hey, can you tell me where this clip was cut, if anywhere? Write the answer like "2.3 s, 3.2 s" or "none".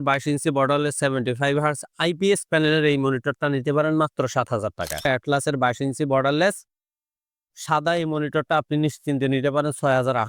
5.1 s